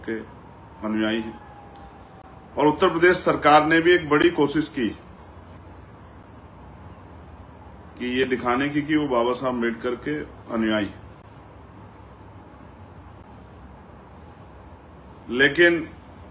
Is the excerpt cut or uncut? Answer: uncut